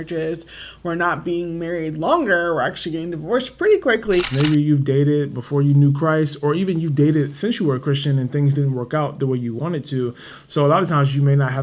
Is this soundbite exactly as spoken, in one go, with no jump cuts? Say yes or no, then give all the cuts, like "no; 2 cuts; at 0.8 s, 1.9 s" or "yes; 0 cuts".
no; 1 cut; at 4.3 s